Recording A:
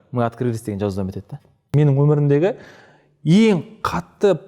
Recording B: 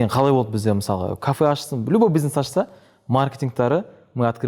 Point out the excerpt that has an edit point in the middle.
A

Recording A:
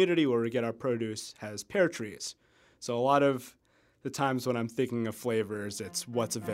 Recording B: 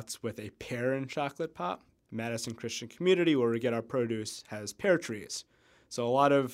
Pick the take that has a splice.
B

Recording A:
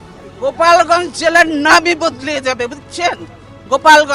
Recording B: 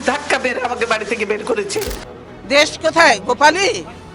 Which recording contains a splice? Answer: B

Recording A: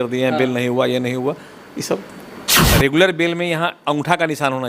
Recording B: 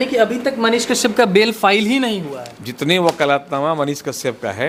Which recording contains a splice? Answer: A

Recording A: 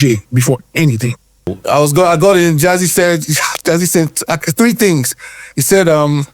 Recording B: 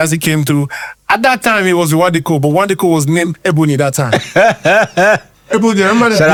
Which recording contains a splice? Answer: A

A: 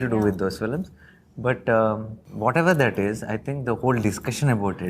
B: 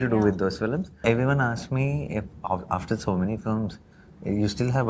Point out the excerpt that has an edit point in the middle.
B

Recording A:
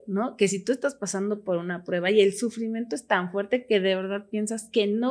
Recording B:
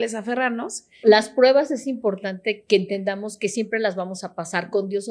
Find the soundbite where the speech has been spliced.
B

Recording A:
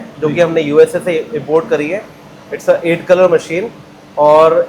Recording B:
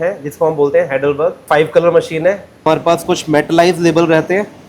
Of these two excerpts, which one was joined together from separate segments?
B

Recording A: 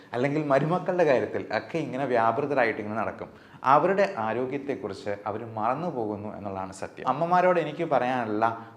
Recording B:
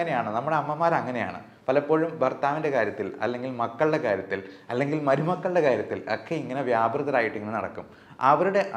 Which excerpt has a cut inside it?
A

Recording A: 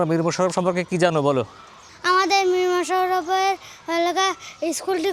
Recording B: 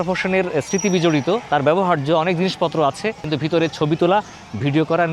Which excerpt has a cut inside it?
B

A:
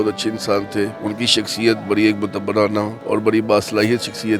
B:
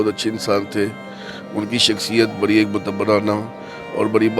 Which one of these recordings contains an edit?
A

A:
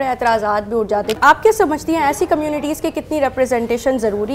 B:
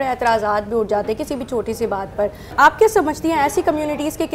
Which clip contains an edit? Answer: A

